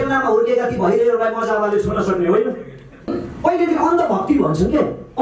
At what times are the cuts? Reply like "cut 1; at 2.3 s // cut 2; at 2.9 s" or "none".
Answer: cut 1; at 3.1 s